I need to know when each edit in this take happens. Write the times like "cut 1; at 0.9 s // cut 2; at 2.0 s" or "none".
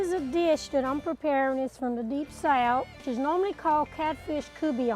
cut 1; at 3.0 s

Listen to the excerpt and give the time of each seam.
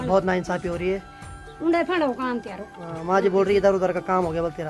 none

